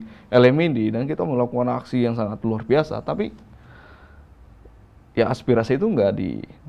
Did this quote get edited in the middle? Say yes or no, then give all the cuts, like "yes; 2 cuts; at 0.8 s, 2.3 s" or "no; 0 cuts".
no; 0 cuts